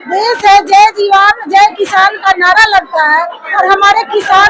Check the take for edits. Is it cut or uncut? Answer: uncut